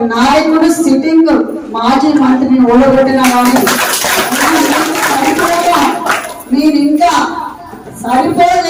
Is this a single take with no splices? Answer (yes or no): yes